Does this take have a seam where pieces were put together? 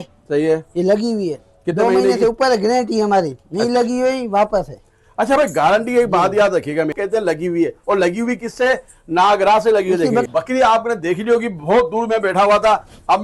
yes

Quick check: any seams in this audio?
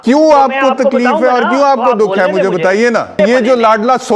yes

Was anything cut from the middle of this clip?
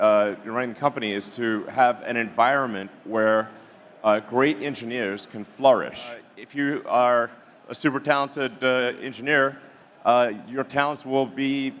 yes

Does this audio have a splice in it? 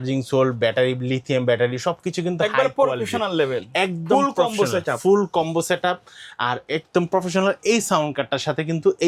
no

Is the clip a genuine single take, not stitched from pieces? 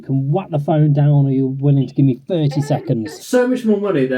no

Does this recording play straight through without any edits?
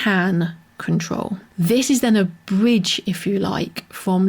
no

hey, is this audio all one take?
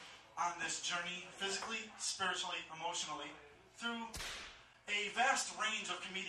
no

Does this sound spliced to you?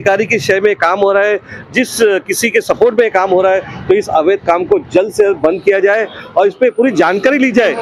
no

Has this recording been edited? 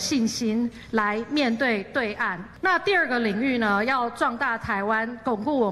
yes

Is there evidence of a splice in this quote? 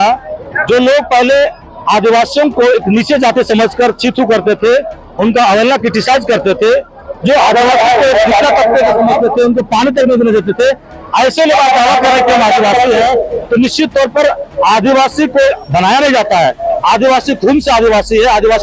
no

